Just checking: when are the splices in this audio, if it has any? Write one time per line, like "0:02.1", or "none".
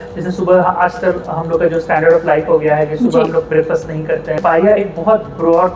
0:04.4

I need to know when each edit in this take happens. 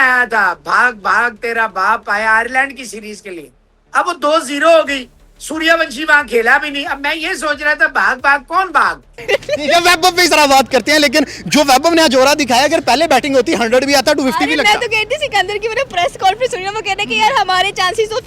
0:09.2

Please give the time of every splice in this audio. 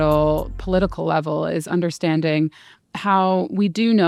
none

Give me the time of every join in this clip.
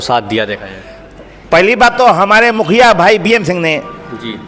none

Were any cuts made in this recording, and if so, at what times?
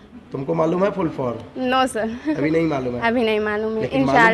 none

